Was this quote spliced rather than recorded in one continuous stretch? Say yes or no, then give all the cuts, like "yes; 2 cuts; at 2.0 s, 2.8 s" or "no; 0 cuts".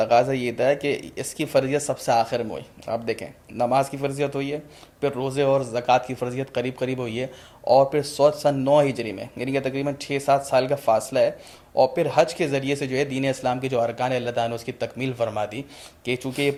no; 0 cuts